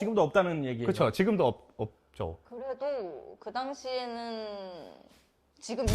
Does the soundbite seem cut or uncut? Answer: cut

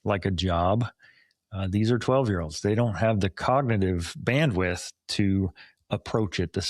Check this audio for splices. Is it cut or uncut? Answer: uncut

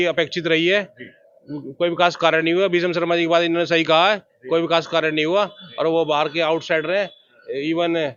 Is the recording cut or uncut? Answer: uncut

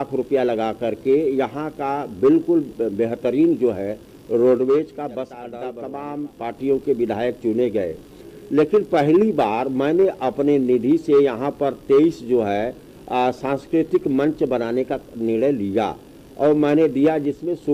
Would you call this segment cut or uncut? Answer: cut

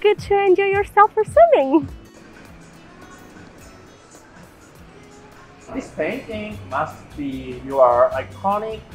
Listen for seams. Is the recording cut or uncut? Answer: uncut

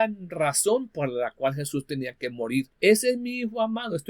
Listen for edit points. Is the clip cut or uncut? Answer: cut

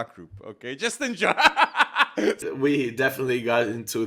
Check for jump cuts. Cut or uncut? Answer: cut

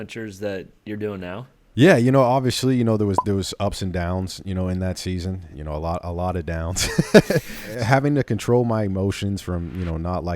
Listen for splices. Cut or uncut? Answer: cut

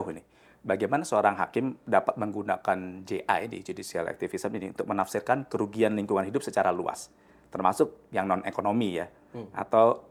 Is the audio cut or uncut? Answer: uncut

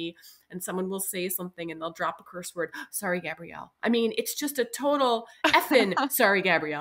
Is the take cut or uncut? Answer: uncut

